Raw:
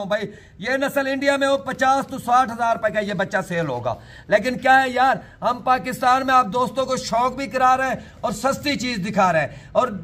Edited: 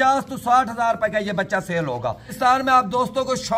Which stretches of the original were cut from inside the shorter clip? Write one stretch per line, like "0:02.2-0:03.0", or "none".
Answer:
0:04.1-0:05.9